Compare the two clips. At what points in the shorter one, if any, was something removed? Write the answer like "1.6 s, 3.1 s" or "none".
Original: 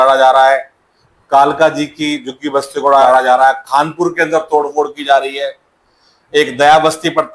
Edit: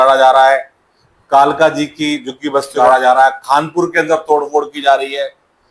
2.8 s